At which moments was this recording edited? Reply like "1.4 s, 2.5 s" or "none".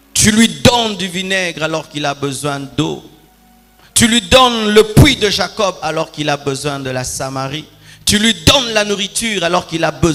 none